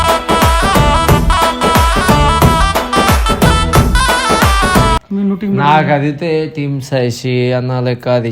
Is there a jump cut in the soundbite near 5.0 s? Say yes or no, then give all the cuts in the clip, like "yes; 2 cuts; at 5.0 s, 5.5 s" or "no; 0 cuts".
yes; 1 cut; at 5.0 s